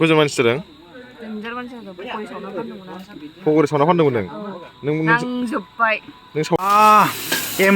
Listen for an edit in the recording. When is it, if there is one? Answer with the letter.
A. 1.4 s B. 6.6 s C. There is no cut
B